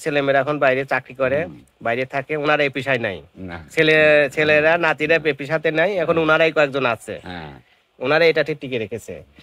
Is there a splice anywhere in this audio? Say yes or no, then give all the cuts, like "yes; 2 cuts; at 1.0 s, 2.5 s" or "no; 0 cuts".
no; 0 cuts